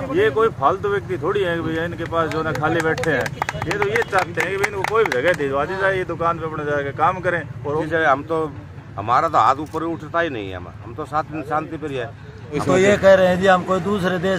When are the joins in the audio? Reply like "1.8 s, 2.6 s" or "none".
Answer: 7.8 s, 12.6 s

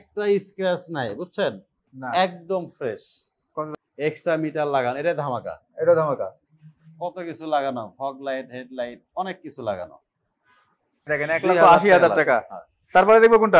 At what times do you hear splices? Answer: 3.7 s, 11.1 s

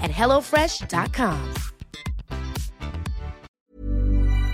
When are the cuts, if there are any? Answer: 3.6 s

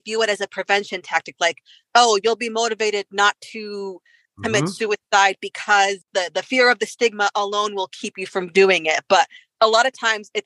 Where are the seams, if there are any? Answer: none

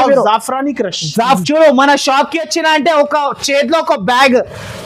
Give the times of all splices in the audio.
1.4 s

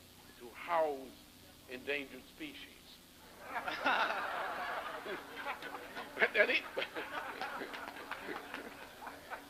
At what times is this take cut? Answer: none

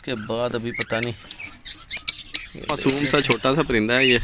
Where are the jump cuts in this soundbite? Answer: 2.7 s

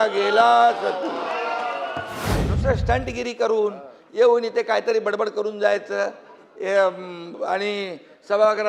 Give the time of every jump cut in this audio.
2.4 s

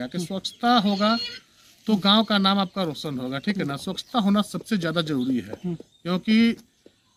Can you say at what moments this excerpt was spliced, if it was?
none

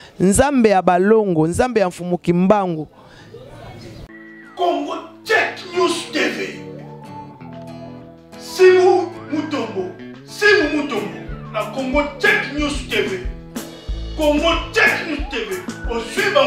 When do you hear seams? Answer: 4.0 s

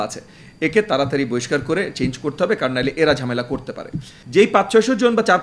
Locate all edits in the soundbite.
4.2 s

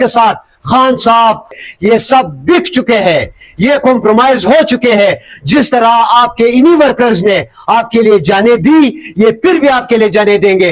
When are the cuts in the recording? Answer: 1.5 s

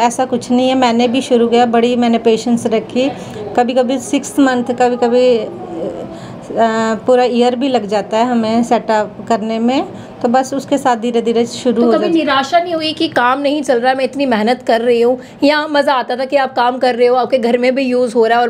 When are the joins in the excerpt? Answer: none

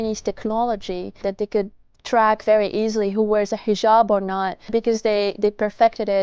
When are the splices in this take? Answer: 1.2 s, 4.7 s

